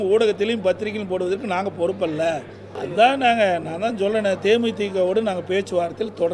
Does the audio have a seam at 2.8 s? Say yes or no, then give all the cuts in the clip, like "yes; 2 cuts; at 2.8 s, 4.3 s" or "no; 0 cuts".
yes; 1 cut; at 2.8 s